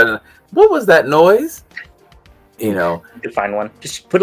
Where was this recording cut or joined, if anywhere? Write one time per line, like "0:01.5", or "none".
none